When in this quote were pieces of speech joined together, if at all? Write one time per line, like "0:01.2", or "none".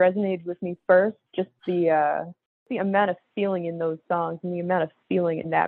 0:02.7